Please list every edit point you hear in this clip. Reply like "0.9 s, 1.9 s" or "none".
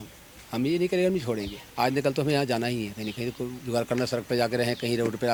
none